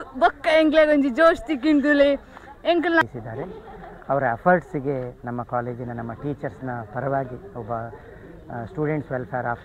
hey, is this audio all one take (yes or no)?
no